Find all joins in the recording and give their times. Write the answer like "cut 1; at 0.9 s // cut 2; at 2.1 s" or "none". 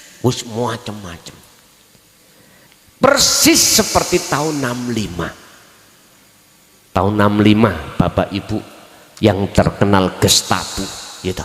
cut 1; at 2.7 s